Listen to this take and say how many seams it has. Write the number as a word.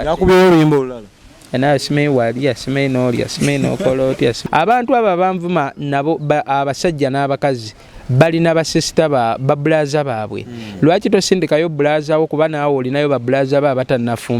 one